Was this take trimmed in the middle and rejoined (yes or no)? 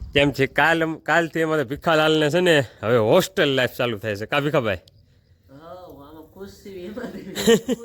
no